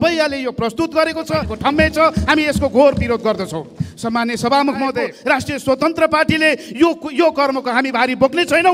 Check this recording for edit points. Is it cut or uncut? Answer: cut